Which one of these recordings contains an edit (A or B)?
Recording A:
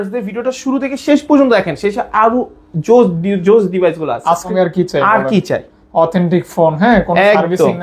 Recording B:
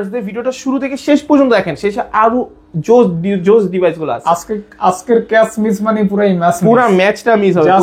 A